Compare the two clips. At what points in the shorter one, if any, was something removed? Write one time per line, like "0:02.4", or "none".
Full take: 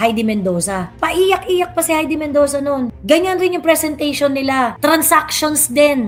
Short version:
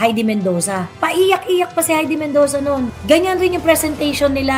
none